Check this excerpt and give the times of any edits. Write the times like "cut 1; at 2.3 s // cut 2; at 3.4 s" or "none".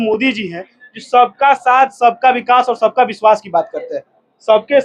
none